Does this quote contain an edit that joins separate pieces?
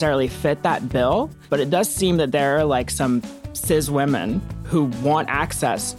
no; 0 cuts

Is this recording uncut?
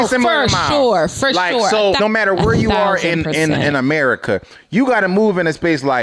no; 1 cut; at 2.0 s

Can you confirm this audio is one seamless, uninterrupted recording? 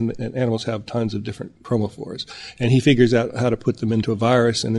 no; 2 cuts; at 1.5 s, 4.0 s

